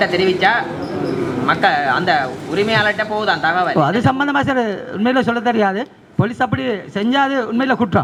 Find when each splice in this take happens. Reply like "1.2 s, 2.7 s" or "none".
none